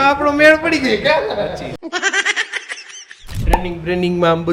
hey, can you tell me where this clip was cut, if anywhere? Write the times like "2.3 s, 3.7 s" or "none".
3.3 s